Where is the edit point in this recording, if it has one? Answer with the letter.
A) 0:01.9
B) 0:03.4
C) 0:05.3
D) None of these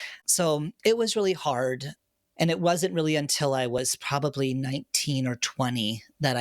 A